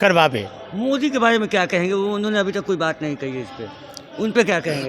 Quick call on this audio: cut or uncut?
uncut